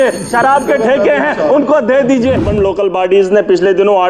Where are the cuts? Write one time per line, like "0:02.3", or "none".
0:02.5